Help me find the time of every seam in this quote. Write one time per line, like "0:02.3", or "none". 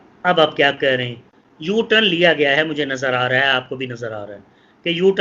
none